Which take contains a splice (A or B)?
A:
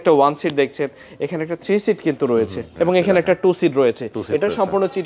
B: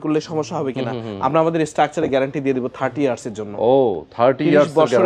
A